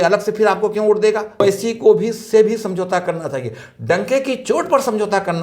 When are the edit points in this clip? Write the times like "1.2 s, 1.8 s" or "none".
1.4 s